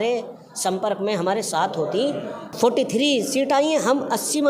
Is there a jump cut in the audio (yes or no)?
yes